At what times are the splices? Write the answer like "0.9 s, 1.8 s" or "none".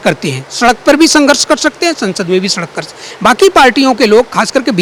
none